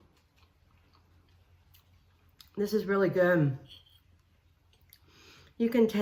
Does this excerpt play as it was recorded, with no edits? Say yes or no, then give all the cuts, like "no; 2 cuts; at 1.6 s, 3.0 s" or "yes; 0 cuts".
yes; 0 cuts